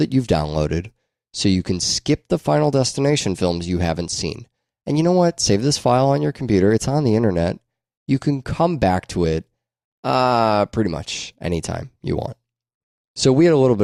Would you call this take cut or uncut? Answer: uncut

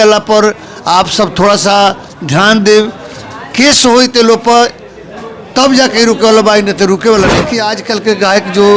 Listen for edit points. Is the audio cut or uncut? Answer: cut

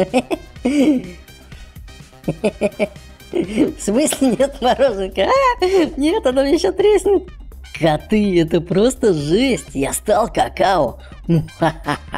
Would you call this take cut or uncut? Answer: cut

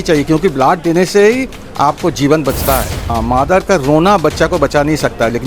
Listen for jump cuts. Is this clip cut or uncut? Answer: cut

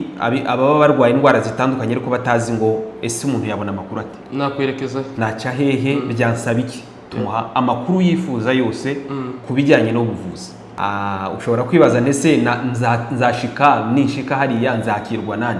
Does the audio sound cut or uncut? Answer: cut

